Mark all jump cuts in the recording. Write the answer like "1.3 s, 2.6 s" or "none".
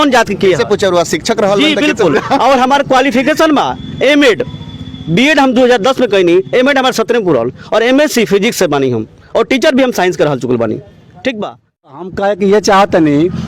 12.1 s